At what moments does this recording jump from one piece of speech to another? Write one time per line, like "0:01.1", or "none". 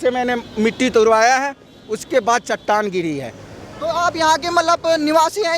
none